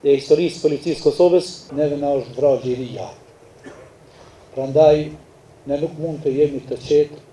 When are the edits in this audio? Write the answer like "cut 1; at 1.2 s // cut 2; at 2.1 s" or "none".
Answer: cut 1; at 1.6 s

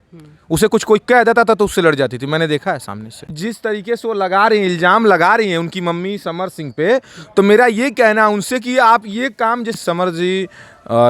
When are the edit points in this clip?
cut 1; at 3.3 s // cut 2; at 9.8 s

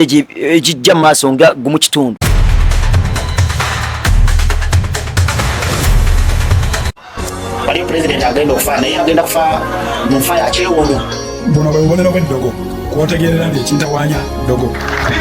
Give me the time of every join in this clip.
cut 1; at 2.2 s

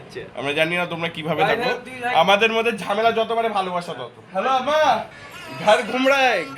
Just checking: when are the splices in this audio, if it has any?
cut 1; at 4.7 s

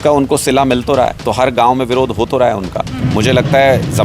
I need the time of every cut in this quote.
cut 1; at 1.2 s

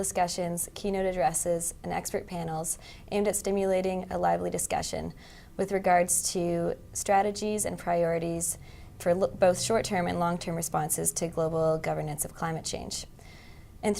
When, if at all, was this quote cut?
cut 1; at 10.6 s

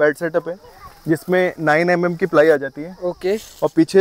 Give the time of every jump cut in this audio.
none

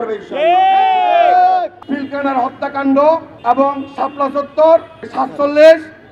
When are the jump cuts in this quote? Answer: cut 1; at 1.8 s // cut 2; at 3.3 s // cut 3; at 5.1 s

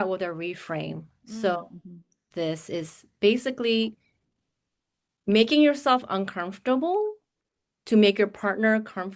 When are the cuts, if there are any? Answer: cut 1; at 2.2 s

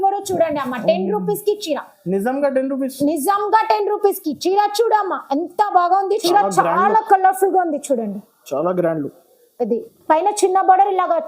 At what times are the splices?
cut 1; at 6.2 s

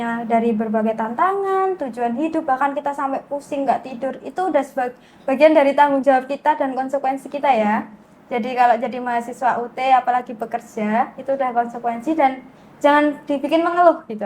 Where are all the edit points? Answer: none

